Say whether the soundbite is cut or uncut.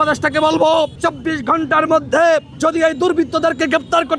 cut